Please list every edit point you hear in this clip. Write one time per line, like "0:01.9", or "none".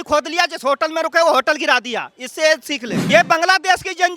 0:03.0

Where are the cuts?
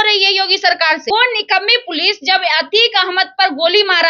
0:01.1

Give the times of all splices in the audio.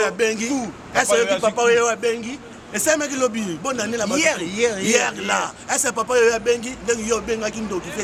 none

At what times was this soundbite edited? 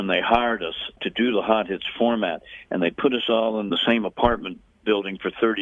0:01.0
0:03.7

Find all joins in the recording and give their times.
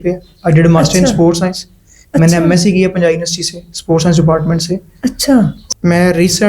0:05.6

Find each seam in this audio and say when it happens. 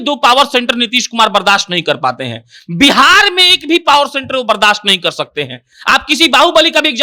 none

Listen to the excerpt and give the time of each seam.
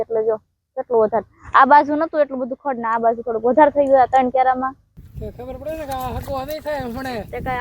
0:05.0

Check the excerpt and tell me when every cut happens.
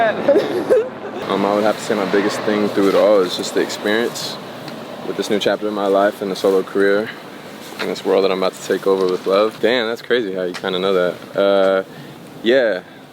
0:01.1
0:09.6

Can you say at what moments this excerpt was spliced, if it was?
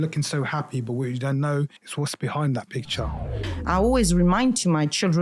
0:01.8
0:03.4

